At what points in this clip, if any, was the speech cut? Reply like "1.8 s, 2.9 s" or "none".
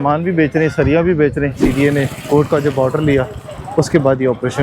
1.6 s